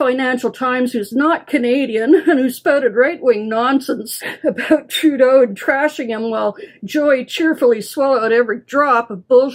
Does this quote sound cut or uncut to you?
uncut